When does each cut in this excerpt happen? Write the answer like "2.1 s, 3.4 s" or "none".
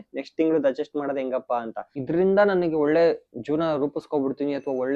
2.0 s

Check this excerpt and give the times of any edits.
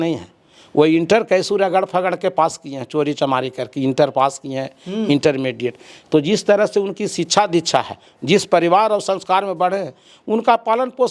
none

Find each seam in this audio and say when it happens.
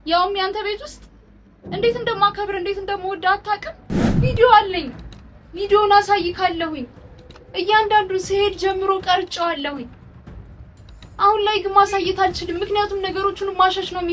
4.2 s

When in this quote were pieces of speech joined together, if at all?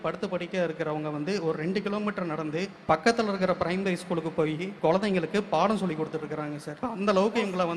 2.7 s, 4.7 s, 6.7 s

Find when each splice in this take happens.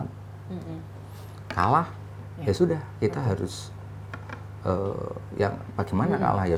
none

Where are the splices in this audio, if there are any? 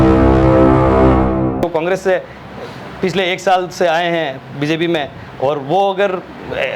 1.6 s

